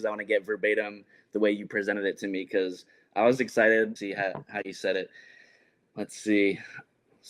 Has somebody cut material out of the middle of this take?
yes; 1 cut; at 4.0 s

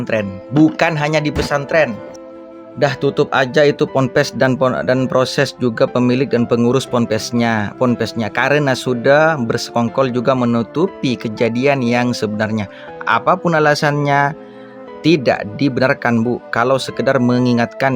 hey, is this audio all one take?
no; 1 cut; at 2.1 s

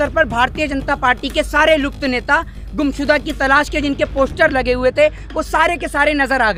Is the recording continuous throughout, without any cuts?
yes; 0 cuts

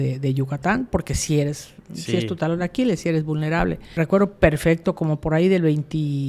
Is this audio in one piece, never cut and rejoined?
no; 1 cut; at 3.8 s

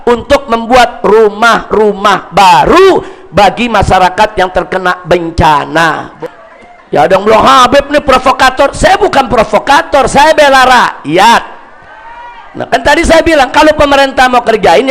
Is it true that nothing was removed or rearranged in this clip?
no; 1 cut; at 6.1 s

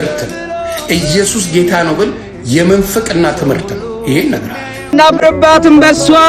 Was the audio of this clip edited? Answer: yes; 1 cut; at 4.9 s

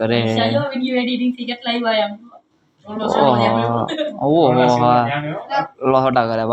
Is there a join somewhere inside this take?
no; 0 cuts

